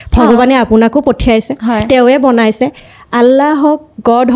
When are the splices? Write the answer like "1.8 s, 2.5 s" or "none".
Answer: none